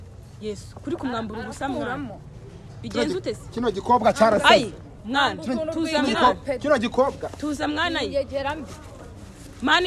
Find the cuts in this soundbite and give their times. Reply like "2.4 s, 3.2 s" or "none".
none